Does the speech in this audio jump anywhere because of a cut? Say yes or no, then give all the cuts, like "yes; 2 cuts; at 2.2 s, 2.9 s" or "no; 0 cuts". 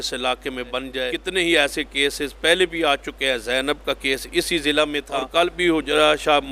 yes; 2 cuts; at 1.1 s, 5.2 s